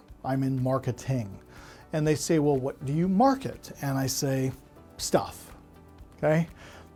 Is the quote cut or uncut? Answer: uncut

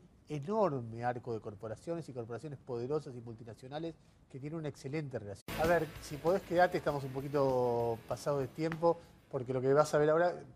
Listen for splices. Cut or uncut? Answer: uncut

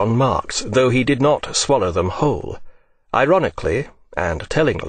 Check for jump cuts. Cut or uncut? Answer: uncut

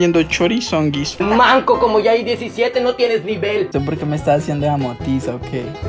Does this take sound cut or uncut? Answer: cut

